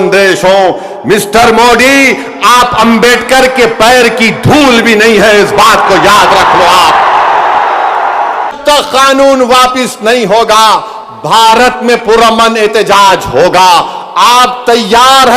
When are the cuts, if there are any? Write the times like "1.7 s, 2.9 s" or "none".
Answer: 8.5 s